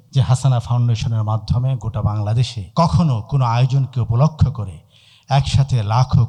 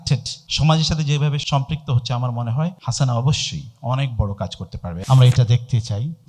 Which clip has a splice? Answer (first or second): second